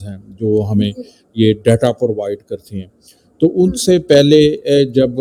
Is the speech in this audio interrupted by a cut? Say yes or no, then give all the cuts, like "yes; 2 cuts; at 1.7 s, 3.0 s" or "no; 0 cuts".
no; 0 cuts